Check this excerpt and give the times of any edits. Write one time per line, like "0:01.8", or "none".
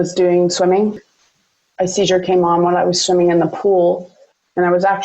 0:01.0